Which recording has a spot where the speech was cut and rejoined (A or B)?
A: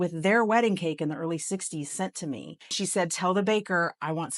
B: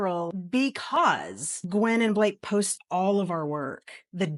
A